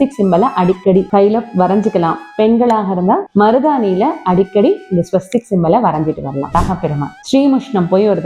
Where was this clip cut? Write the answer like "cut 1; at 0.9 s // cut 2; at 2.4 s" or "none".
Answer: cut 1; at 1.1 s // cut 2; at 3.3 s // cut 3; at 6.5 s